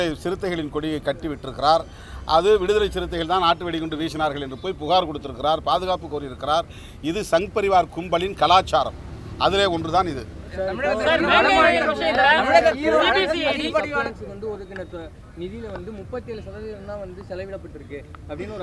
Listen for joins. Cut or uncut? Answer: uncut